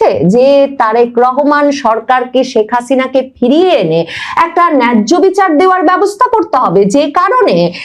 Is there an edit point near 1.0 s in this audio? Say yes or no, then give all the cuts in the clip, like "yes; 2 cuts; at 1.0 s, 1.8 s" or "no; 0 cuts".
no; 0 cuts